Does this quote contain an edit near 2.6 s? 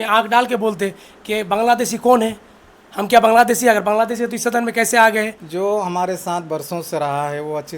no; 1 cut; at 5.4 s

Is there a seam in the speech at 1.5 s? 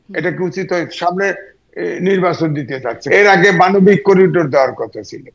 no; 1 cut; at 3.0 s

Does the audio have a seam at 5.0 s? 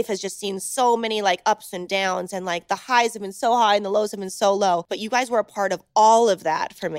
yes; 1 cut; at 5.0 s

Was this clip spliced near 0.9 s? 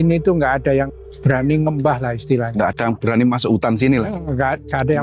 yes; 1 cut; at 0.9 s

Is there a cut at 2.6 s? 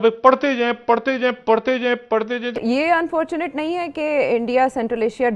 yes; 1 cut; at 2.6 s

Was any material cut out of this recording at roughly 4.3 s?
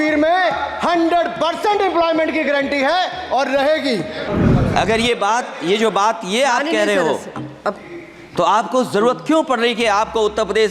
yes; 1 cut; at 4.3 s

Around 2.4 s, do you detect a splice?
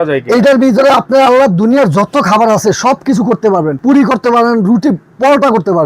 no; 1 cut; at 3.8 s

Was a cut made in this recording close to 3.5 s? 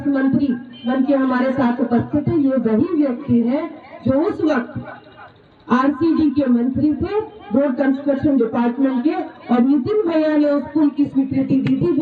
no; 0 cuts

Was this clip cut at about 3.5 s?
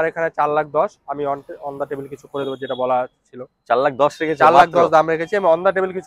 no; 0 cuts

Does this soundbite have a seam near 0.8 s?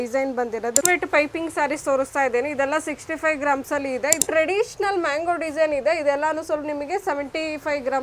yes; 2 cuts; at 0.8 s, 4.2 s

